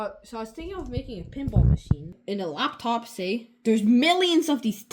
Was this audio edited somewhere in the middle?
yes; 1 cut; at 2.2 s

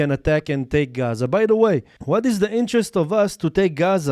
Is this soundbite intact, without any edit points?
no; 1 cut; at 1.9 s

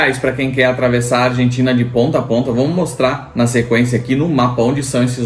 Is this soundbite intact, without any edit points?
yes; 0 cuts

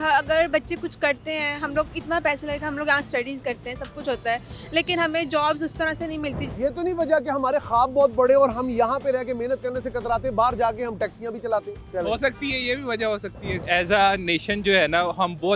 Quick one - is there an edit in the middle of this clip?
yes; 3 cuts; at 6.4 s, 11.8 s, 13.6 s

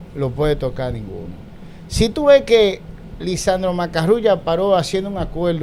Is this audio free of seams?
yes; 0 cuts

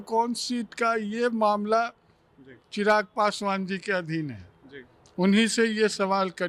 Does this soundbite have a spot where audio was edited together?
no; 0 cuts

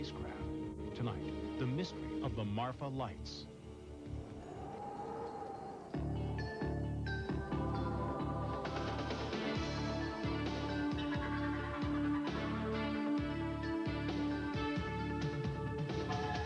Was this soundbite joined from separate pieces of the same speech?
yes; 1 cut; at 15.1 s

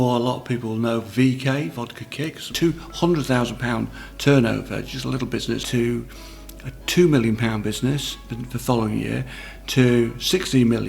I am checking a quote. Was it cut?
yes; 2 cuts; at 2.5 s, 5.6 s

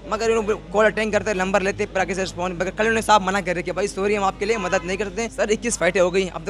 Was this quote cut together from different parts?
yes; 1 cut; at 5.3 s

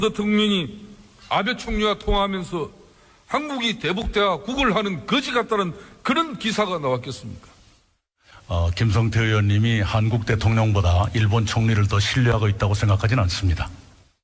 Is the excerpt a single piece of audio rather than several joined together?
no; 1 cut; at 1.8 s

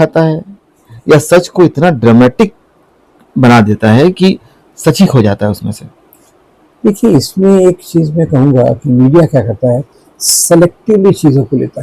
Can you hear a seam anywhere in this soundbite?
no; 0 cuts

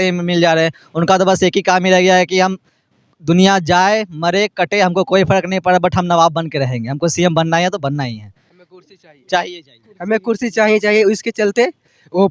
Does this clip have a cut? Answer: no; 0 cuts

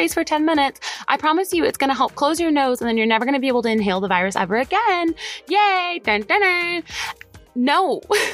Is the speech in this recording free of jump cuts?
yes; 0 cuts

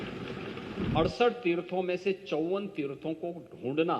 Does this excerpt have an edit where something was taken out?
yes; 1 cut; at 0.9 s

